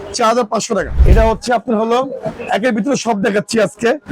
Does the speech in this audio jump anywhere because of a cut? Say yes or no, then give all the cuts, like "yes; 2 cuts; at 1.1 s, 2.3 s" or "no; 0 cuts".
yes; 1 cut; at 1.0 s